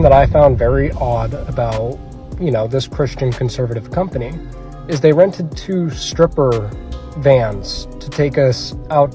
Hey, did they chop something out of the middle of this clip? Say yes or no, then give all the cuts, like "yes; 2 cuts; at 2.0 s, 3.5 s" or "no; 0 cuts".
no; 0 cuts